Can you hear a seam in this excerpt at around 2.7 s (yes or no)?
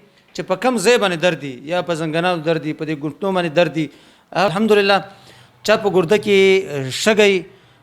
no